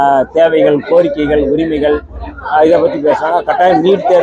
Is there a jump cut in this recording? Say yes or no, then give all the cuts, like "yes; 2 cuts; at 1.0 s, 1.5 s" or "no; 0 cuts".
no; 0 cuts